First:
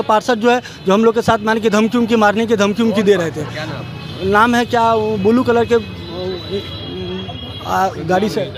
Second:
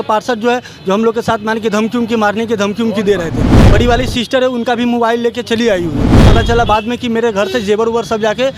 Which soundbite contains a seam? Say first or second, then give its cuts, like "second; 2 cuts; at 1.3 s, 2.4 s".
second; 2 cuts; at 3.7 s, 6.2 s